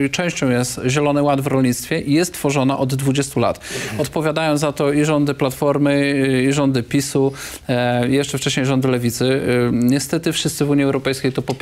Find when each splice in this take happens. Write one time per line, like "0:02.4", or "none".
none